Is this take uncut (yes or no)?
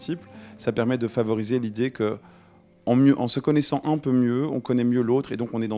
yes